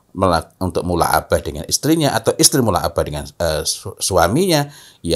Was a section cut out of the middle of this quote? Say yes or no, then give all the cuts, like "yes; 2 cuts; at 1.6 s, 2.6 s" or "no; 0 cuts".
no; 0 cuts